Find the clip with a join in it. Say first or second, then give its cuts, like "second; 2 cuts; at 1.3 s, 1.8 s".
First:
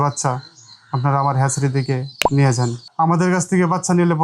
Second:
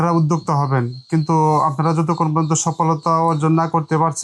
first; 1 cut; at 2.9 s